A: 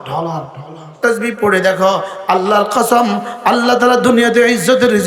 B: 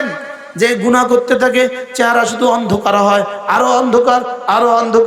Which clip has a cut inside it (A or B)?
A